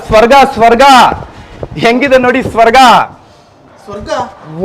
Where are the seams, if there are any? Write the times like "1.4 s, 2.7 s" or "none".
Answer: none